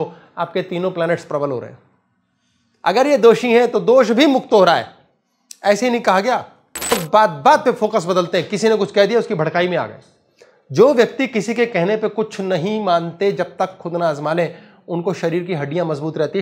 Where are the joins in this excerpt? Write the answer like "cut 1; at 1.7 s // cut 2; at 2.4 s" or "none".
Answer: cut 1; at 7.0 s